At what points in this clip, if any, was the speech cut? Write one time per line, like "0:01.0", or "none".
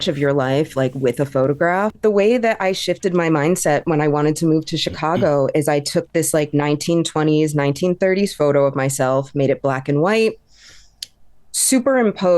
0:01.9